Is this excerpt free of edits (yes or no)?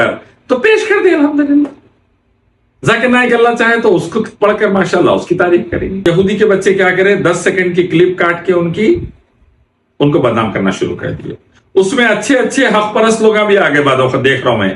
no